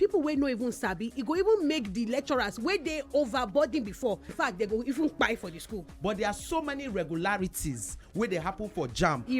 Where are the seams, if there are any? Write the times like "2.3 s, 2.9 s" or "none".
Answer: 4.3 s, 5.8 s